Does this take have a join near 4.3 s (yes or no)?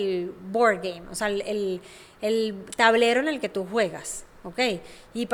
no